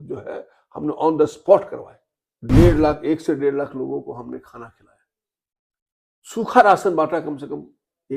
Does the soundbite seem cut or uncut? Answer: cut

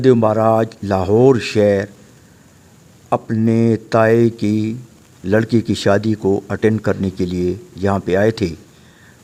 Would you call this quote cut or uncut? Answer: uncut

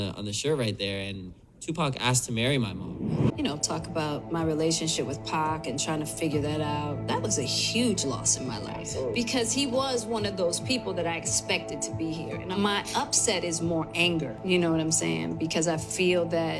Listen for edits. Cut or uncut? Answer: cut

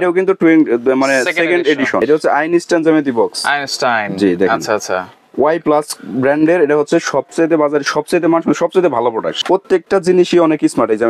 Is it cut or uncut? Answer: cut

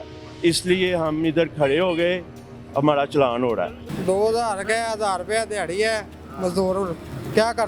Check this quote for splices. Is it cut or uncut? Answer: cut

